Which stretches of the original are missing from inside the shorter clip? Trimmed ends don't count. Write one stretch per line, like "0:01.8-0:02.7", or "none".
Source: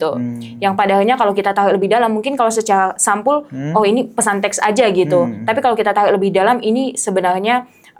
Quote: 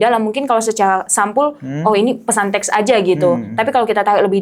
none